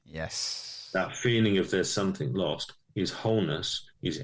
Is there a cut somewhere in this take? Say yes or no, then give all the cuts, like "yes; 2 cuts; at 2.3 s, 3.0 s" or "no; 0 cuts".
no; 0 cuts